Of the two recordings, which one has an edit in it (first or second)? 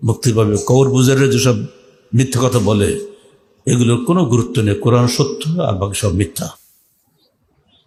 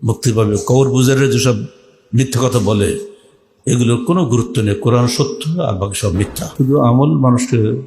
second